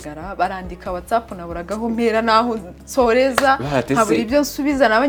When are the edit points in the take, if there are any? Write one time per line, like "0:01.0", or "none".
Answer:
none